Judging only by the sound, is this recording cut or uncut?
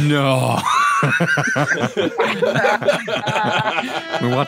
uncut